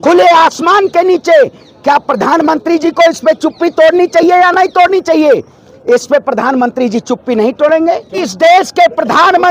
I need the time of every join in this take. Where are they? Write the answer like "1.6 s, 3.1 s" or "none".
8.3 s